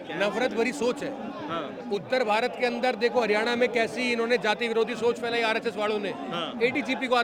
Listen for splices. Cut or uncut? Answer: uncut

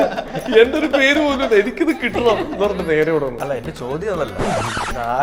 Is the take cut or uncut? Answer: uncut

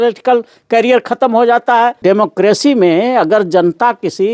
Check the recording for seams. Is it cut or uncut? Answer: cut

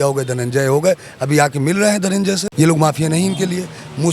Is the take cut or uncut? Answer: cut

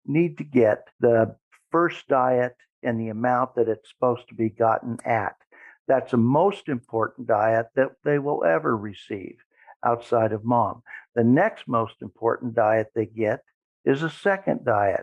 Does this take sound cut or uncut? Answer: cut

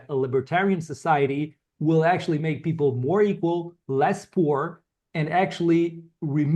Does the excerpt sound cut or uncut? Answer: uncut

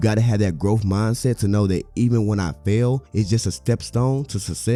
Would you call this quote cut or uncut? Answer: uncut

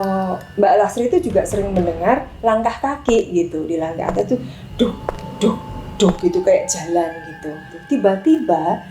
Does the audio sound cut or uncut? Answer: cut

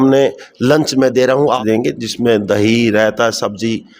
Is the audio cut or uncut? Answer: cut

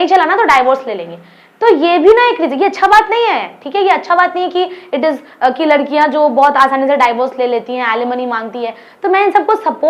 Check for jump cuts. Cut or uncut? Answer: uncut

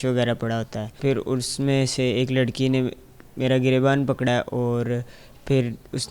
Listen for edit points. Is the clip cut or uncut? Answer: cut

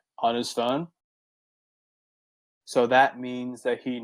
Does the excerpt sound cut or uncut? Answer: uncut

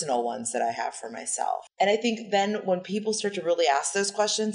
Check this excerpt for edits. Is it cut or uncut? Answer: cut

